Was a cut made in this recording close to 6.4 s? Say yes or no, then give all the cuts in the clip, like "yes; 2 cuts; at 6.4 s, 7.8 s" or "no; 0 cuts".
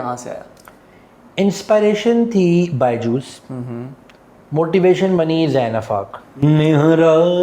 yes; 1 cut; at 6.4 s